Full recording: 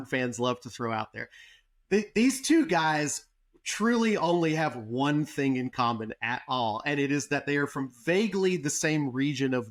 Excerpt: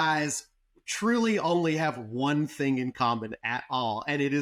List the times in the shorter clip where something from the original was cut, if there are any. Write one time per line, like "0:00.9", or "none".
none